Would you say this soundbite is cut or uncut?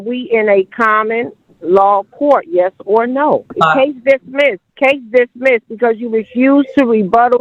cut